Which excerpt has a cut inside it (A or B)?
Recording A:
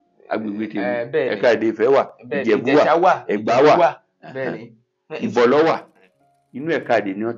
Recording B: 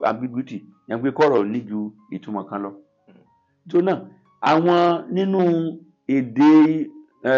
A